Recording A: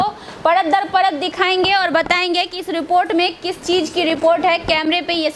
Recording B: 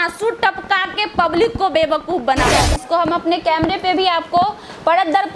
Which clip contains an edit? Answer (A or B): B